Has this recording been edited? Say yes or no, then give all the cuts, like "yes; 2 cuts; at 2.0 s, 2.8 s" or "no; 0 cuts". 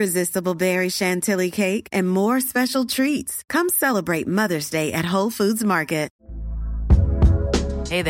yes; 1 cut; at 6.2 s